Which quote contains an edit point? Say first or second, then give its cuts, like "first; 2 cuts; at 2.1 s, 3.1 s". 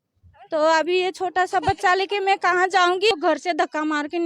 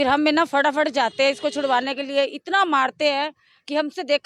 first; 1 cut; at 3.1 s